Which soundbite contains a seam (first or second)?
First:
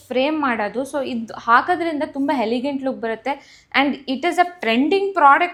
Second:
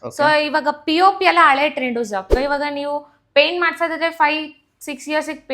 second